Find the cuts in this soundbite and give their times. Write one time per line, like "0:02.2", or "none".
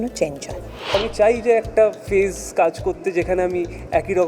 0:00.9